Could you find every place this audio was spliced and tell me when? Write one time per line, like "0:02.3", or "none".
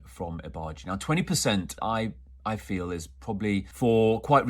0:01.7
0:03.7